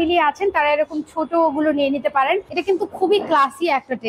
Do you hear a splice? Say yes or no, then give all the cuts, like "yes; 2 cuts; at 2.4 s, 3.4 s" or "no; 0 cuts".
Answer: yes; 1 cut; at 2.5 s